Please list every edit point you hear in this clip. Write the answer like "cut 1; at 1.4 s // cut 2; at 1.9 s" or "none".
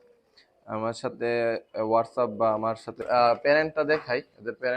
cut 1; at 3.0 s